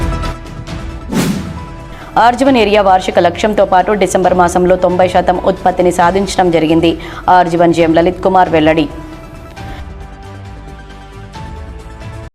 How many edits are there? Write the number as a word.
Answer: one